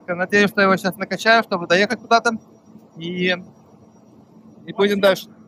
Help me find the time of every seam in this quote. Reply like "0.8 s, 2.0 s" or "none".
none